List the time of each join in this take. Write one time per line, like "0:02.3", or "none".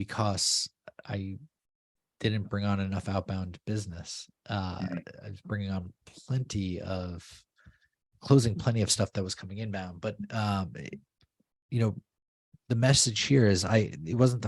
none